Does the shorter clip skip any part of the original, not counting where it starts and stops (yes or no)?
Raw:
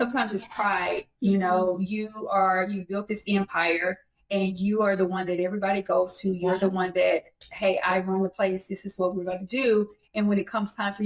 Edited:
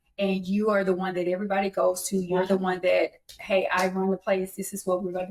no